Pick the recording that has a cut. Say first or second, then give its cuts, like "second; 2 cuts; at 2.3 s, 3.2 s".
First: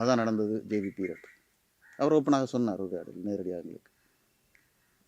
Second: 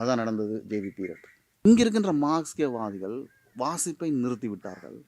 second; 1 cut; at 1.6 s